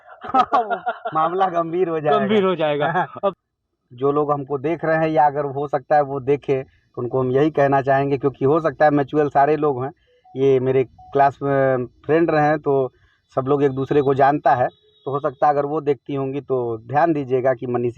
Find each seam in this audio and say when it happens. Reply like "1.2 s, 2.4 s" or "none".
3.4 s